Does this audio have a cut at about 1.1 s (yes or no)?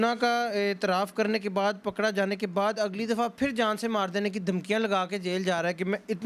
no